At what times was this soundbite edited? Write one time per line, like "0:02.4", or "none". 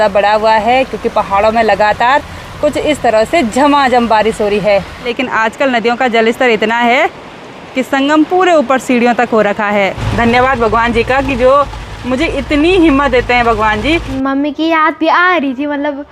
0:05.1
0:10.0
0:14.1